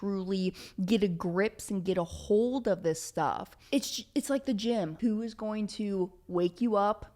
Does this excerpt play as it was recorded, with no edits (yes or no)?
no